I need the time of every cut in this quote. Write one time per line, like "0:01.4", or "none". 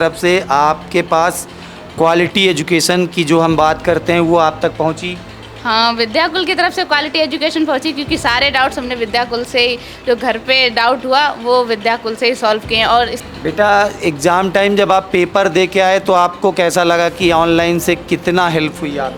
0:13.2